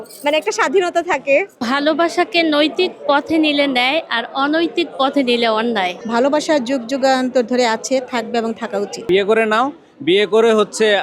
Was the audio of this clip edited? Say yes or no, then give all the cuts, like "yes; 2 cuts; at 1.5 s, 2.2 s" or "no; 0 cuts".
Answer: yes; 3 cuts; at 1.5 s, 6.0 s, 9.0 s